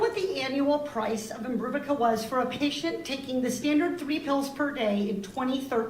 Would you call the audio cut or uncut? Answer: cut